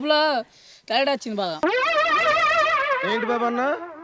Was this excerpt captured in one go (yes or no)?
no